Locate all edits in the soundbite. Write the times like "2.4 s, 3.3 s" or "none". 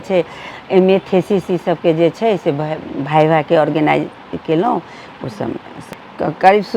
5.8 s